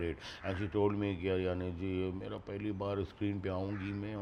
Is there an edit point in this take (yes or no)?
no